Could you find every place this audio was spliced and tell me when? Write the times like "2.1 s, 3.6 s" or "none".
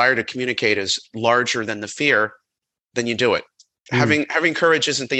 1.0 s, 3.7 s